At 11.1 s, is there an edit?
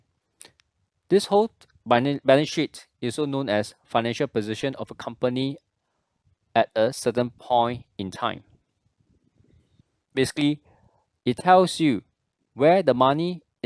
no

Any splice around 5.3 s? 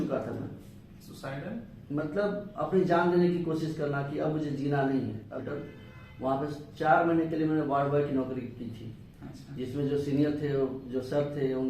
yes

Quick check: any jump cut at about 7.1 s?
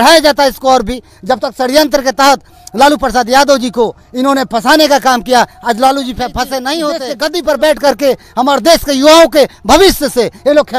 yes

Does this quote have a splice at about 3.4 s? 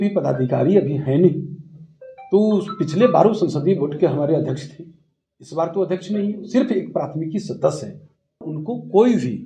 no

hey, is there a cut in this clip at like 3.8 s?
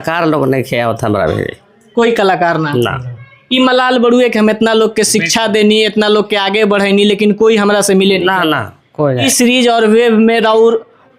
no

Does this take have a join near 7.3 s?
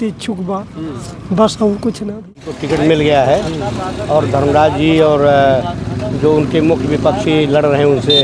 no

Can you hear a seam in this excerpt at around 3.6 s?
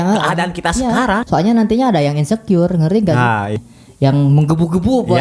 yes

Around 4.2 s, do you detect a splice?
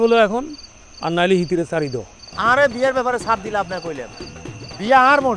no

